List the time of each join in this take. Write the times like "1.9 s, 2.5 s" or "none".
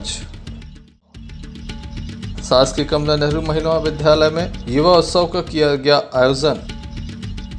6.6 s